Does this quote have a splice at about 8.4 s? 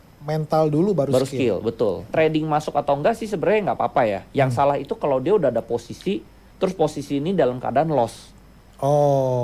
no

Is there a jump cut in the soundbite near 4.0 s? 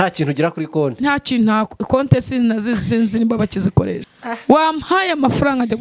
yes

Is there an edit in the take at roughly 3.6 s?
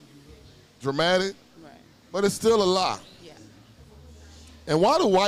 no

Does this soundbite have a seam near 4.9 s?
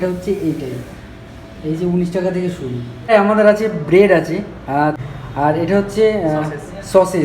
yes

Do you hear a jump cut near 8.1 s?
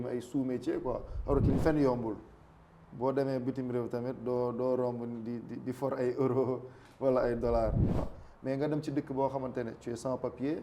yes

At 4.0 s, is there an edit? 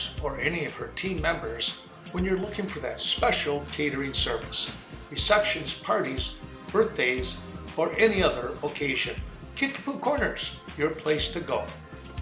no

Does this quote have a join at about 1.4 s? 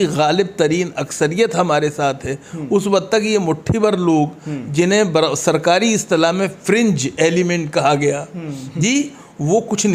no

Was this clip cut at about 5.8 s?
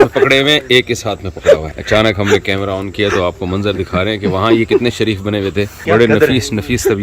yes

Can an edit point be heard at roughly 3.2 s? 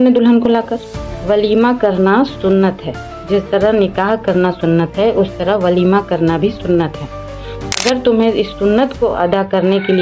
no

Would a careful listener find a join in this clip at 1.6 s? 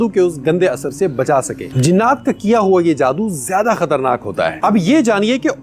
yes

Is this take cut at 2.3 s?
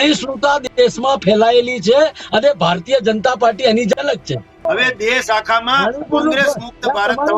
no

